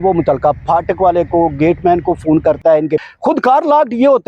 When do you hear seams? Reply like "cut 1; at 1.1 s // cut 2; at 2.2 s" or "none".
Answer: cut 1; at 3.0 s